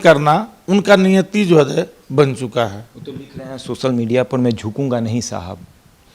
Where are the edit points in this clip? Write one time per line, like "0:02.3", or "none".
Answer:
none